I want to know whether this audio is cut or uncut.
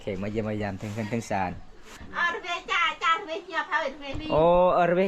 cut